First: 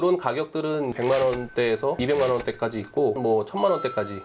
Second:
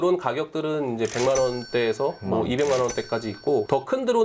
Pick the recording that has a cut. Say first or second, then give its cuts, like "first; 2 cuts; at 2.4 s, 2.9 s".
first; 3 cuts; at 0.9 s, 2.0 s, 3.2 s